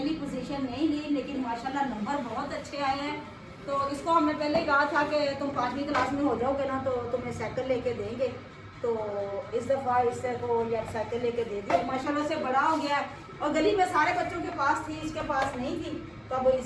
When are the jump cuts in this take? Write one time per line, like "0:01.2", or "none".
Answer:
none